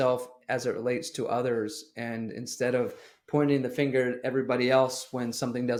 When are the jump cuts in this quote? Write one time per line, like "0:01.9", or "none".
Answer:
none